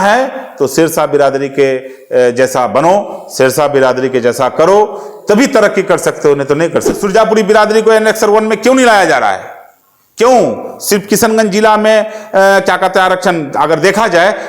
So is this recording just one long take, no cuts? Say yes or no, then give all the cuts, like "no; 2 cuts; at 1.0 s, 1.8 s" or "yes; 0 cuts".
no; 1 cut; at 7.0 s